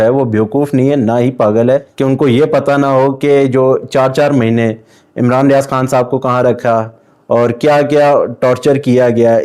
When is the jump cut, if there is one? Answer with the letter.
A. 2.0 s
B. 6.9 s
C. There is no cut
C